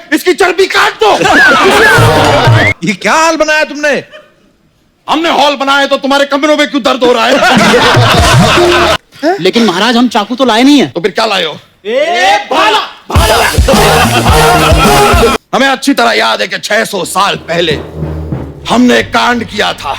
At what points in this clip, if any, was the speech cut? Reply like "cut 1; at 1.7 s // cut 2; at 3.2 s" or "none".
cut 1; at 2.7 s // cut 2; at 9.0 s // cut 3; at 15.3 s